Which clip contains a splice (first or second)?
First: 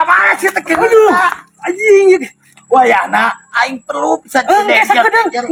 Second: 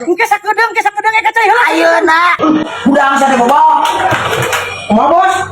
second